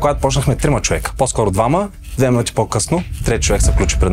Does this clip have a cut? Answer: no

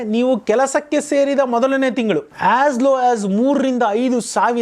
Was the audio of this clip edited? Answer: yes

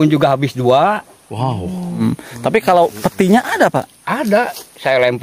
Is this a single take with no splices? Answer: no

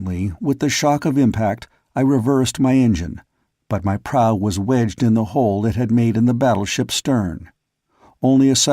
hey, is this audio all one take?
no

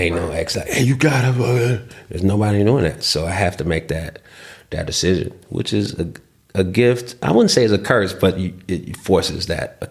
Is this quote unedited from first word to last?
yes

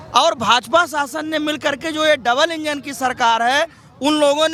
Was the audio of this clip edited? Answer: no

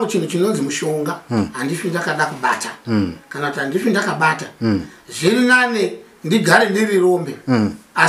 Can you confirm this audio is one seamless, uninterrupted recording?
yes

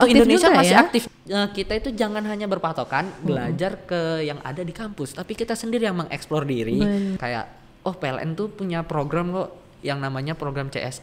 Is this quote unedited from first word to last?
no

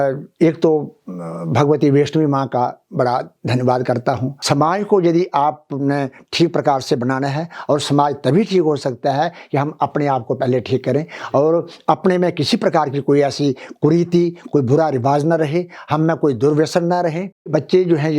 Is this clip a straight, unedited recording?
no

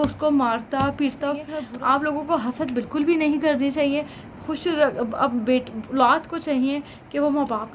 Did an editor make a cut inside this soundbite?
yes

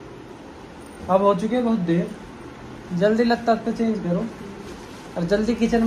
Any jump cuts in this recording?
no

